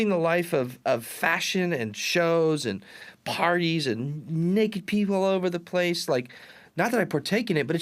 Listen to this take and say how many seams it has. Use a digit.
0